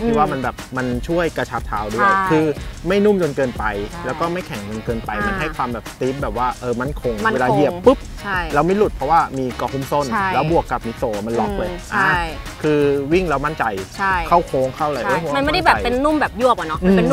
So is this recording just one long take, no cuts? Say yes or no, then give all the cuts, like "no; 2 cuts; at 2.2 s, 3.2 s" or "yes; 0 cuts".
yes; 0 cuts